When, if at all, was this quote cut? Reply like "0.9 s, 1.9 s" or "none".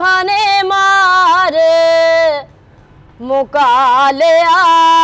none